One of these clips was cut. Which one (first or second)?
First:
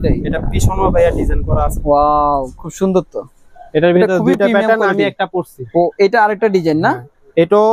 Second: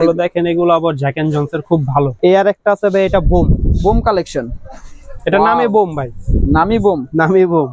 second